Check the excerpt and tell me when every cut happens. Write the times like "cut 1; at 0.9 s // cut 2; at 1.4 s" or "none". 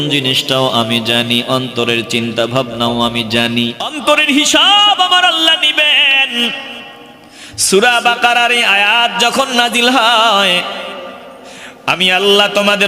cut 1; at 3.9 s